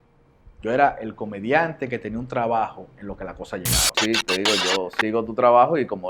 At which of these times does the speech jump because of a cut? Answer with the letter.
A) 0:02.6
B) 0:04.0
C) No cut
B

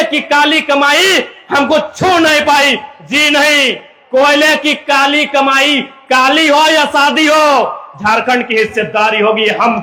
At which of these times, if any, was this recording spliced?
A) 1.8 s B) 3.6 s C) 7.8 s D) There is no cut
D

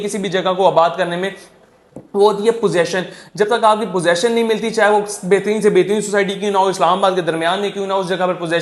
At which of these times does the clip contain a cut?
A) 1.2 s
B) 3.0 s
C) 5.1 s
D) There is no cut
D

